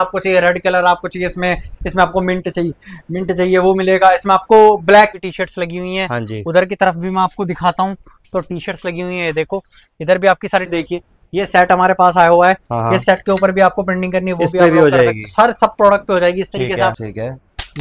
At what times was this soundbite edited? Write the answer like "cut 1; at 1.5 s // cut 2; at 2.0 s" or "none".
cut 1; at 5.1 s // cut 2; at 10.7 s // cut 3; at 17.0 s